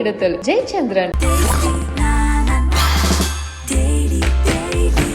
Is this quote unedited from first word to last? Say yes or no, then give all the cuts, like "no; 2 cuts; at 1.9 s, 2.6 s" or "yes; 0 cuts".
yes; 0 cuts